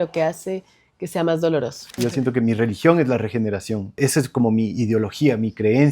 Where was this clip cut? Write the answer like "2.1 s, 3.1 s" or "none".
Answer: 1.9 s, 4.0 s

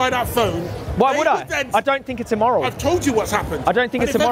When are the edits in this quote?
none

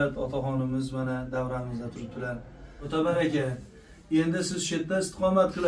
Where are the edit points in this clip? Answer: 2.8 s

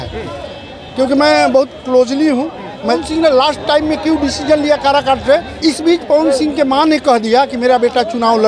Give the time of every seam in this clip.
3.0 s, 5.5 s

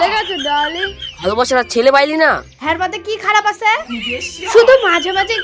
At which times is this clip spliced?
0.9 s, 2.5 s, 4.4 s

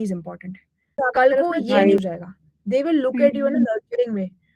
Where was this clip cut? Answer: 2.0 s

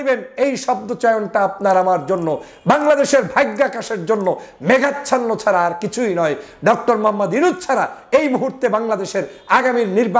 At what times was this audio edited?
none

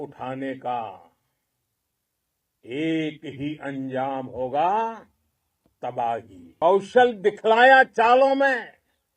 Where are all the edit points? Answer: 6.6 s

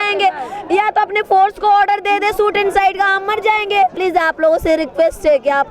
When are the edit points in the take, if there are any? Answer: 4.0 s

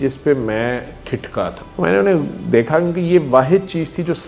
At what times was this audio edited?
1.6 s

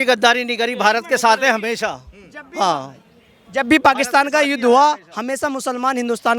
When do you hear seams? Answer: none

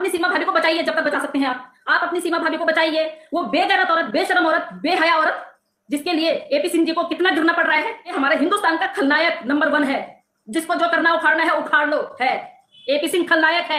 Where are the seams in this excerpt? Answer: 8.1 s

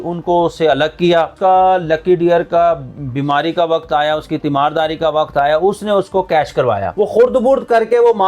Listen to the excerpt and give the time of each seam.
1.3 s, 6.9 s

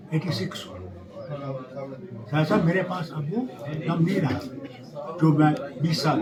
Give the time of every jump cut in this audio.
none

